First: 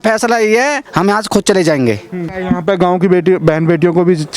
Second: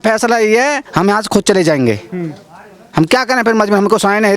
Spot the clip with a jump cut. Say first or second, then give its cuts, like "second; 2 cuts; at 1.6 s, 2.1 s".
first; 1 cut; at 2.3 s